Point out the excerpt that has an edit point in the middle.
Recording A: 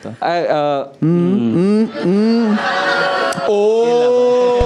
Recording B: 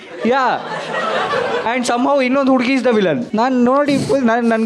B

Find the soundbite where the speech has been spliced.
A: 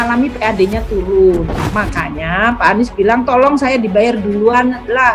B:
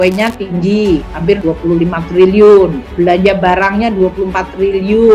B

